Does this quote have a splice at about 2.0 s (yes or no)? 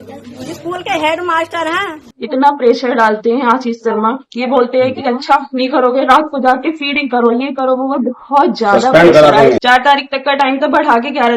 yes